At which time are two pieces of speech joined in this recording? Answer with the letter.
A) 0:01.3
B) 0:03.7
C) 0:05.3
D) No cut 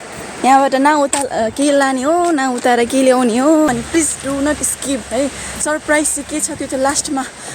B